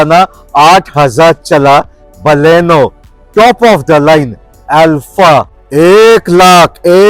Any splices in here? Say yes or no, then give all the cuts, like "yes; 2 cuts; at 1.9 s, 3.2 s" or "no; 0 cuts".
yes; 1 cut; at 5.6 s